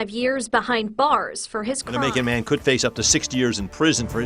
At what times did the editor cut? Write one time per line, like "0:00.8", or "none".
0:01.9